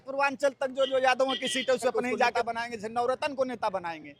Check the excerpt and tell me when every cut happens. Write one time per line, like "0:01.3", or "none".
0:02.4